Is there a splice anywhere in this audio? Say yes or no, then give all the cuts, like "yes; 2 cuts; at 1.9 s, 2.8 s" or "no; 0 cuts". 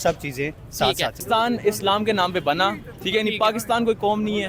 yes; 1 cut; at 1.2 s